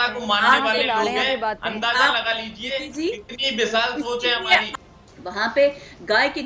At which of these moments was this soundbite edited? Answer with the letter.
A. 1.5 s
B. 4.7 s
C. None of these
B